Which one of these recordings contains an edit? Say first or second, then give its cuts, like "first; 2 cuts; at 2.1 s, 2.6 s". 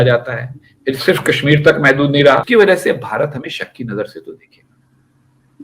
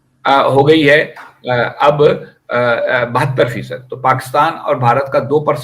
first; 1 cut; at 2.4 s